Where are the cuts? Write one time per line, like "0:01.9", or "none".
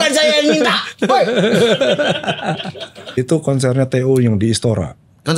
0:03.2